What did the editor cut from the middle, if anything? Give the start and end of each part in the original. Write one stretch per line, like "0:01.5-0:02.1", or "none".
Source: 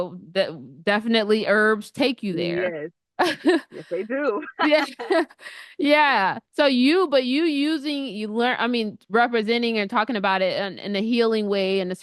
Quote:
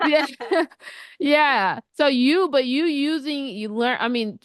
none